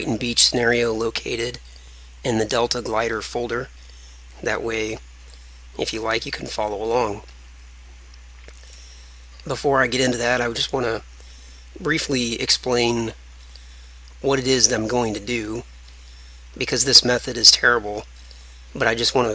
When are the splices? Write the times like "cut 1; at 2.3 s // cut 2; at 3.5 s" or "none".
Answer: cut 1; at 7.9 s